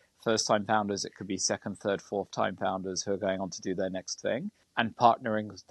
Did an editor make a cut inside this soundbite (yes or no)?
yes